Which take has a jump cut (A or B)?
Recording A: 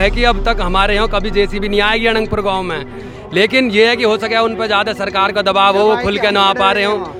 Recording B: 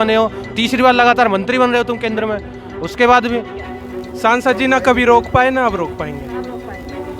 B